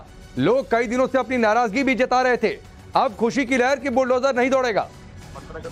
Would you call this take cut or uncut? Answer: uncut